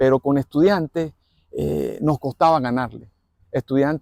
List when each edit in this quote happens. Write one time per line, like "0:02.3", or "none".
none